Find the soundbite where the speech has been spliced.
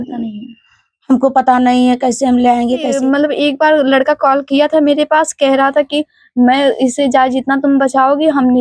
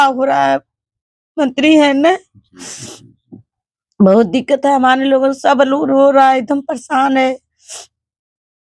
first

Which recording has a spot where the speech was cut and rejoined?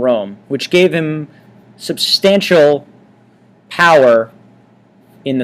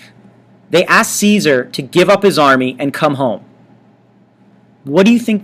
first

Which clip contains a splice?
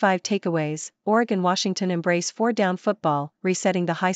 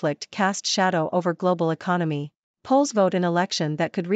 second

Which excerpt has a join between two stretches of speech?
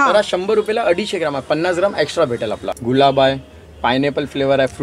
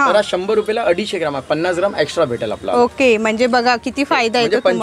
first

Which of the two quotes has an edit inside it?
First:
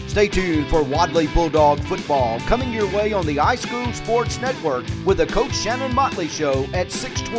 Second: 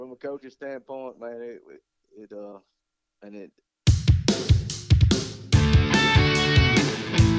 second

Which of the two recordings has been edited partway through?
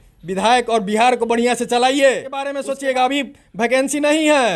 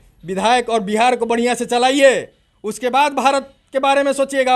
first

